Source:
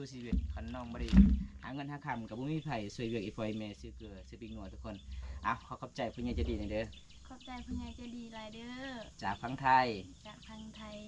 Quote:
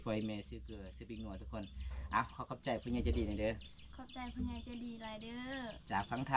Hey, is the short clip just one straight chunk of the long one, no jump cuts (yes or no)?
yes